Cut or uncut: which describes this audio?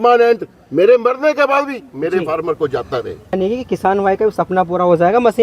cut